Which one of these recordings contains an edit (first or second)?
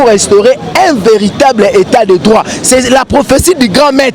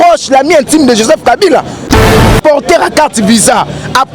second